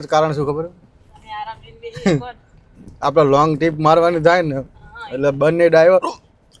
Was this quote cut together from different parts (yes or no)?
no